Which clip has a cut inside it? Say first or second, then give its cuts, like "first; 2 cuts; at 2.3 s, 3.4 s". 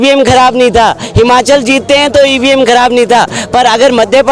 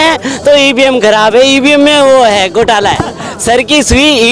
second; 1 cut; at 3.3 s